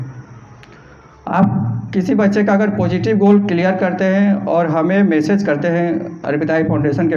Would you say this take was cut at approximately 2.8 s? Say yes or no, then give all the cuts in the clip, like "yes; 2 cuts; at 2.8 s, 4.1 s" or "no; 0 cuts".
no; 0 cuts